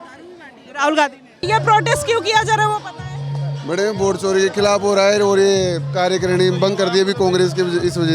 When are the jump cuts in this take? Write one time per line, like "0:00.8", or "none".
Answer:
0:01.4